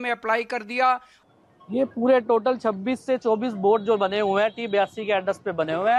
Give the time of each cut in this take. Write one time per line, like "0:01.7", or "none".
0:01.1